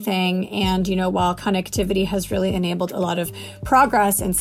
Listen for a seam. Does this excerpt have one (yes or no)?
no